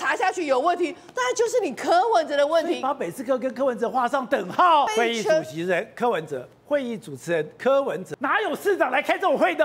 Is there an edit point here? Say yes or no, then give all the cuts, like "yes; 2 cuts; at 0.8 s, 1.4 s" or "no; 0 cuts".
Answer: yes; 2 cuts; at 4.9 s, 8.1 s